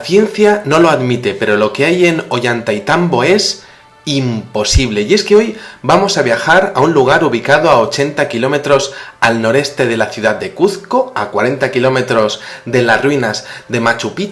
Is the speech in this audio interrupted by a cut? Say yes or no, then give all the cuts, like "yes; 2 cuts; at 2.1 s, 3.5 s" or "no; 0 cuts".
yes; 1 cut; at 9.9 s